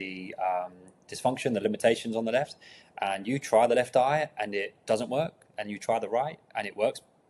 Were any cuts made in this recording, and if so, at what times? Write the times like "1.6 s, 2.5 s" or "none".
none